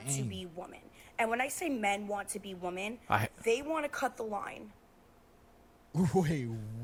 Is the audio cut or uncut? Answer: uncut